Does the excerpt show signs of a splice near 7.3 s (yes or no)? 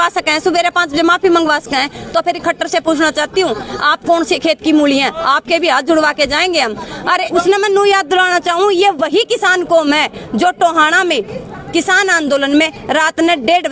yes